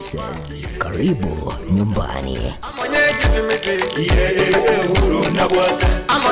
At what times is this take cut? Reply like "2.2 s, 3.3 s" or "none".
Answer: 4.3 s